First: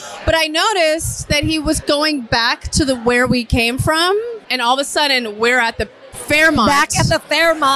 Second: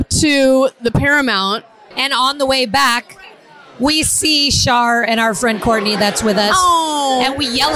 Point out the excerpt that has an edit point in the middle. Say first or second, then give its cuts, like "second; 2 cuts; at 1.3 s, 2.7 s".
first; 1 cut; at 4.5 s